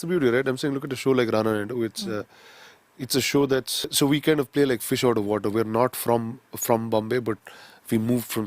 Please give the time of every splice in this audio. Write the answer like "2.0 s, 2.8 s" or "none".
3.9 s